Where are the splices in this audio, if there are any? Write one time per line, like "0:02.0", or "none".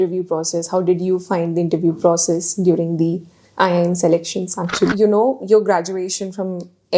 0:04.9